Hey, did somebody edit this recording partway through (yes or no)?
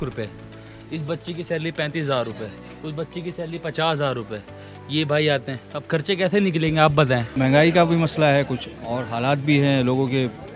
yes